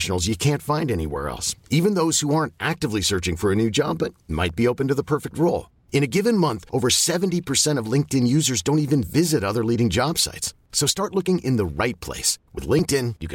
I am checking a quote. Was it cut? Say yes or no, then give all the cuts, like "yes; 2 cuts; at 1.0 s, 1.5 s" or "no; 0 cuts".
no; 0 cuts